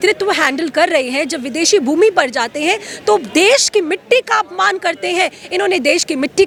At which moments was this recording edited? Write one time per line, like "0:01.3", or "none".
none